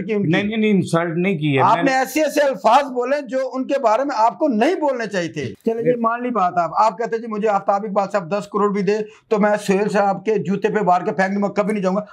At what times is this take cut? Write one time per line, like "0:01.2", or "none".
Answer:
0:05.5